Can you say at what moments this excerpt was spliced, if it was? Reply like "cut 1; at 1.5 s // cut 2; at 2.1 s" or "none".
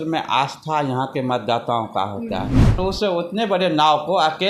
cut 1; at 2.8 s